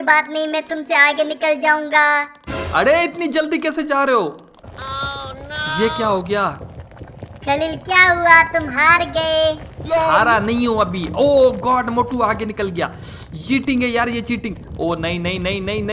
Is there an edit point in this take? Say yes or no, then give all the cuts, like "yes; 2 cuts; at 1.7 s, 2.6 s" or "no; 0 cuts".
yes; 1 cut; at 4.6 s